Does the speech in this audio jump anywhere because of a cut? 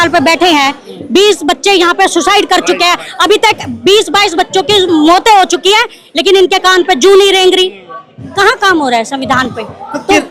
no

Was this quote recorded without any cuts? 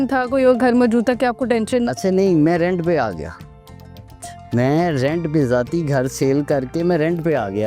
yes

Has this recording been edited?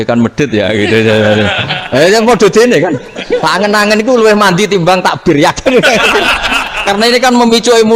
no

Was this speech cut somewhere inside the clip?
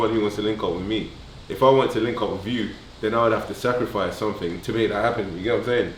yes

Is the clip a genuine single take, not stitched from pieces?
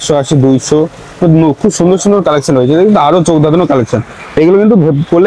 yes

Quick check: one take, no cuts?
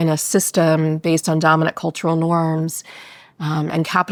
yes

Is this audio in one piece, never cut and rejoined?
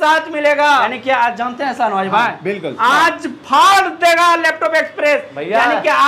no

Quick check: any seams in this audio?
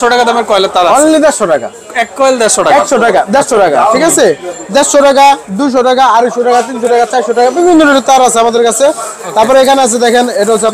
no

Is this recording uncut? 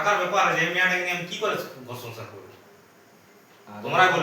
no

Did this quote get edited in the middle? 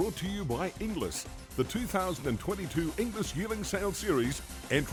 no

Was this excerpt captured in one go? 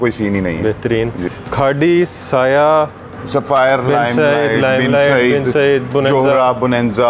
no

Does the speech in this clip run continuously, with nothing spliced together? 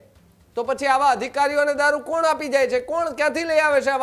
yes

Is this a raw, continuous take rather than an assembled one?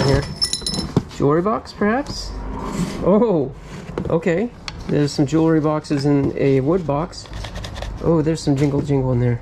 yes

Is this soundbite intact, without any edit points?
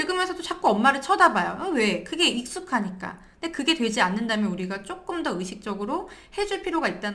yes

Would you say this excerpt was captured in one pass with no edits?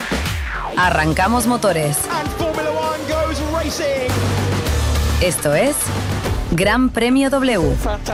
yes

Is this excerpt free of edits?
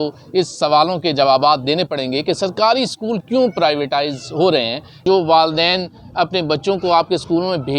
no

